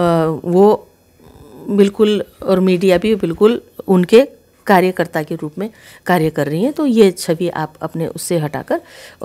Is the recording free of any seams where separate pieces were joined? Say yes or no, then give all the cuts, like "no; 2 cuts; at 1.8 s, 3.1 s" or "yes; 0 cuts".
yes; 0 cuts